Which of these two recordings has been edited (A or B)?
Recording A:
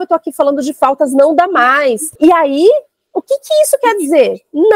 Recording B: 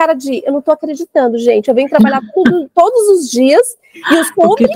A